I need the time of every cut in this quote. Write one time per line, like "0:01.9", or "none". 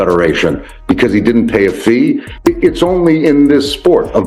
0:02.3